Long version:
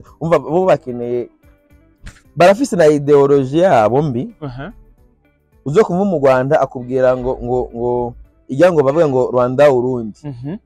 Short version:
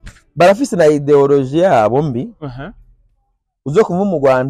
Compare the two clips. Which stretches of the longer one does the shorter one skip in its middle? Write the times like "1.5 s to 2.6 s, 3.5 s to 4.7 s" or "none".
none